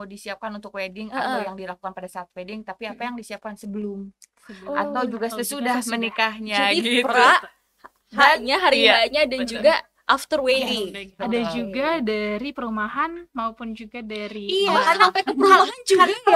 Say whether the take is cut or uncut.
uncut